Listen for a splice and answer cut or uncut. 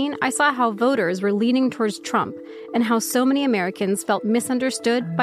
uncut